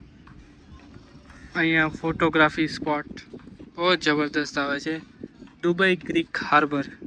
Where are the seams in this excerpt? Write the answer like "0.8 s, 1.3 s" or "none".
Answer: none